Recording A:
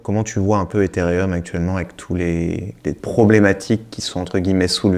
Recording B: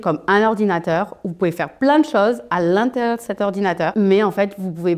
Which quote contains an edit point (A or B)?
B